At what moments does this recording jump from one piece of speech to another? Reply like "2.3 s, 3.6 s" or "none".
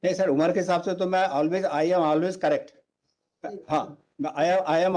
none